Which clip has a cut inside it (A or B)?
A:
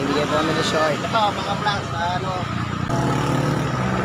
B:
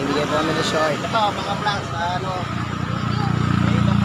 A